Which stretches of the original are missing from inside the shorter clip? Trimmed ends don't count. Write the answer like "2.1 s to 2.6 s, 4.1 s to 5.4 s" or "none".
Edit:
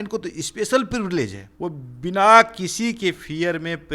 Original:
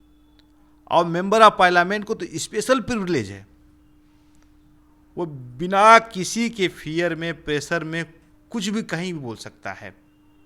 3.4 s to 5.0 s